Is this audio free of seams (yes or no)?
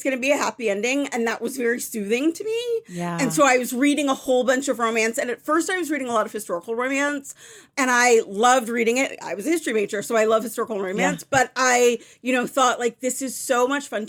yes